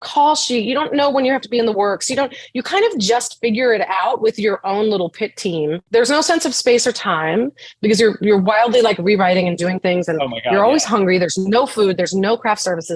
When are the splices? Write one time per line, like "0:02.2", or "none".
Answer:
0:05.8